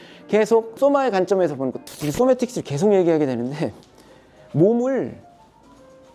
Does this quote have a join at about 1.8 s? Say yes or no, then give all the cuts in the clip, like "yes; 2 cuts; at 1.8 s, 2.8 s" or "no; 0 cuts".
yes; 2 cuts; at 0.8 s, 1.8 s